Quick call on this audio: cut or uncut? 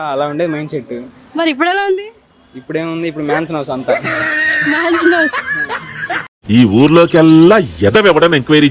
uncut